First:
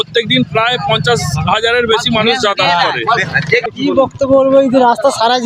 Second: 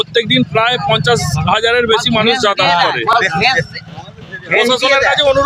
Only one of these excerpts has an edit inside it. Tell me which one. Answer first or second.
first